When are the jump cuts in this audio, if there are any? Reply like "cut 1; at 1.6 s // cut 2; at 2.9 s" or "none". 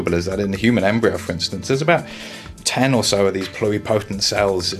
none